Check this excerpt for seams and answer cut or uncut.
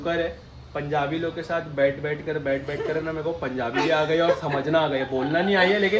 uncut